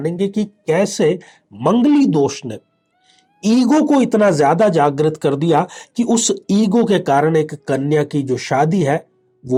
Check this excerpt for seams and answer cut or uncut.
uncut